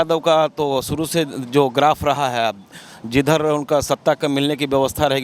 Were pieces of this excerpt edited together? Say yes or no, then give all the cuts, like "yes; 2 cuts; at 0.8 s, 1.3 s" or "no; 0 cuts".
no; 0 cuts